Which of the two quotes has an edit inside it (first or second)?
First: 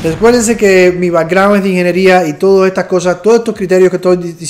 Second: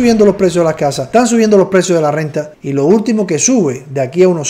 second